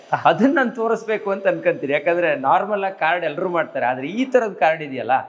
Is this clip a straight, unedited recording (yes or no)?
yes